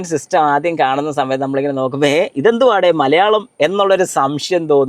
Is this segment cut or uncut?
uncut